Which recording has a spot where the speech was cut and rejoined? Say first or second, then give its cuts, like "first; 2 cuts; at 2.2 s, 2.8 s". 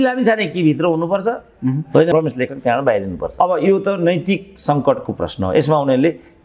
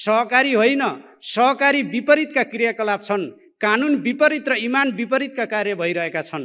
first; 1 cut; at 3.2 s